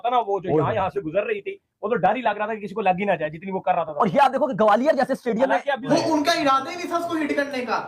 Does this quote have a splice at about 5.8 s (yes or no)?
yes